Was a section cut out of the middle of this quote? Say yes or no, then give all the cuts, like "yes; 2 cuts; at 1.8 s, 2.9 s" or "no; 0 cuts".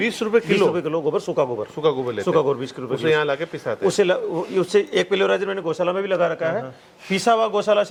no; 0 cuts